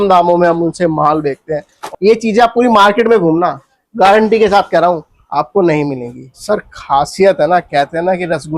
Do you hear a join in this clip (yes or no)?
yes